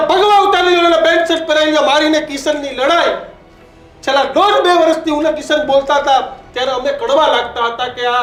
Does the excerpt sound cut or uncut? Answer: uncut